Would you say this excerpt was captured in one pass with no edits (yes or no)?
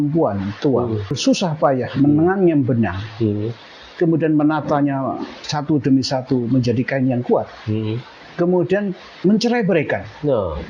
no